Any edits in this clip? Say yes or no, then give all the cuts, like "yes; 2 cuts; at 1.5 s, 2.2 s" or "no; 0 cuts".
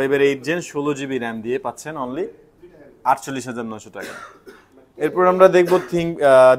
no; 0 cuts